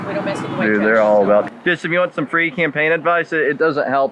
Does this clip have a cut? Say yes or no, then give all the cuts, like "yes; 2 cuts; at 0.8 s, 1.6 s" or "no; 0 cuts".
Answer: yes; 1 cut; at 1.5 s